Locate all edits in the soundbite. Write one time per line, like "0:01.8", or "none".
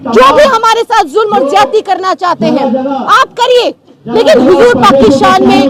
none